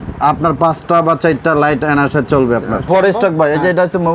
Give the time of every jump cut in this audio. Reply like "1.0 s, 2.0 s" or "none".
2.9 s